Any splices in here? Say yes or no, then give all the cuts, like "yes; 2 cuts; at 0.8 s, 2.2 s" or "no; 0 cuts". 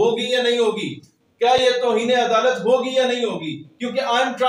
no; 0 cuts